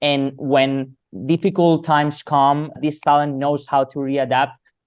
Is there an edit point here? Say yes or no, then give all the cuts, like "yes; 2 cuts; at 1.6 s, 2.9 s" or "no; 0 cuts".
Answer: yes; 2 cuts; at 1.1 s, 2.7 s